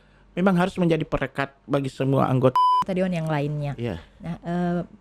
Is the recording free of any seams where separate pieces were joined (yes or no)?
no